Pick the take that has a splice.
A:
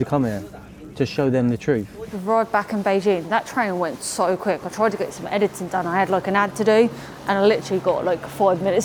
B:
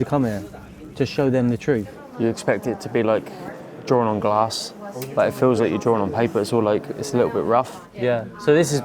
B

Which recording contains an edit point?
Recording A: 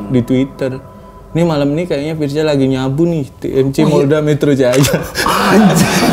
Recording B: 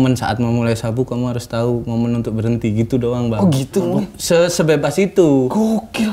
B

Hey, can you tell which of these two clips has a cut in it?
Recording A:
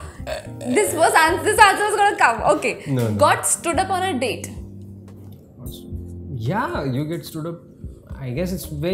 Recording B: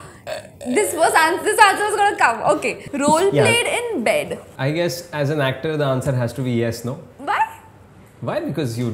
B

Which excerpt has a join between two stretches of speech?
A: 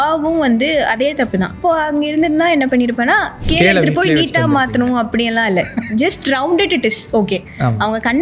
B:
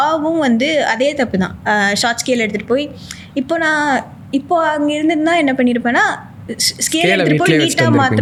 A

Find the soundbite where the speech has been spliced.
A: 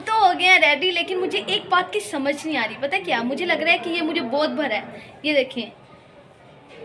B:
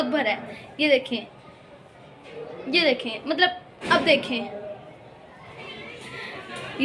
B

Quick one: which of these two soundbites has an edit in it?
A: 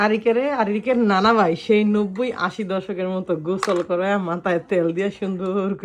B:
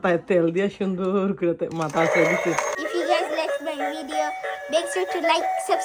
B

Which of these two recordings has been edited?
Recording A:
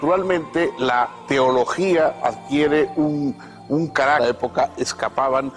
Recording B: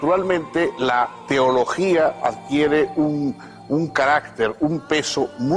B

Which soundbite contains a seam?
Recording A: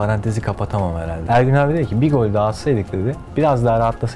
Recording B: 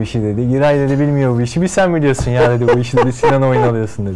A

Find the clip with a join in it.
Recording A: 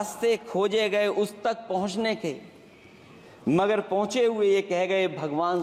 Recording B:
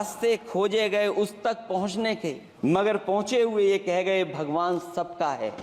B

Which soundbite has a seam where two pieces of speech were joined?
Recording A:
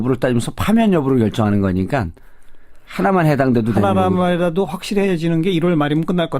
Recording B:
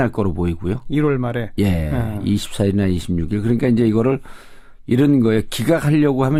A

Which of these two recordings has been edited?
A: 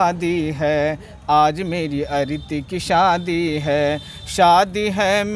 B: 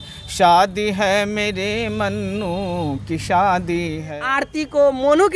B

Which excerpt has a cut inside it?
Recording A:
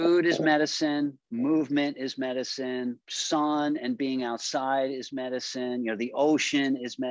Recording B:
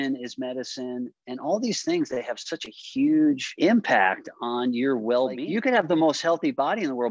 B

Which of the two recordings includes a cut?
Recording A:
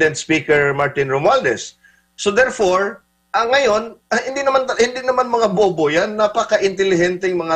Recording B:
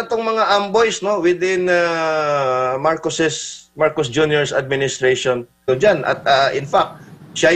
B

